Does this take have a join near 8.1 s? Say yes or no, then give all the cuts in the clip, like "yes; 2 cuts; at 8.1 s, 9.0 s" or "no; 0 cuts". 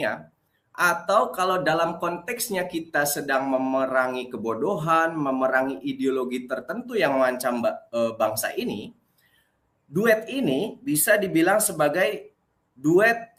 no; 0 cuts